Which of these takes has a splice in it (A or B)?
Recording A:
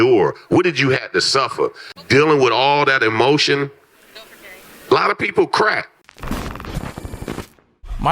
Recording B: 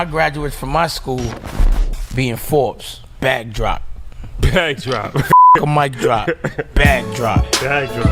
A